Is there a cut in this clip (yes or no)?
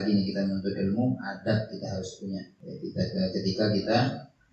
yes